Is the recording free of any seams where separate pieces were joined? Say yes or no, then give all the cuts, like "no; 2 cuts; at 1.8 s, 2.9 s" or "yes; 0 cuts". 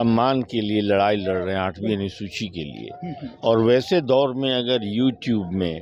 yes; 0 cuts